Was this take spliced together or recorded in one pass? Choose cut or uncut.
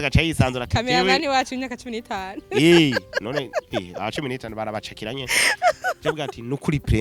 uncut